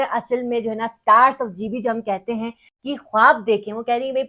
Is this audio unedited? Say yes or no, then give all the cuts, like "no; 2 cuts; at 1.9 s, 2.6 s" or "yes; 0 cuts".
no; 1 cut; at 2.7 s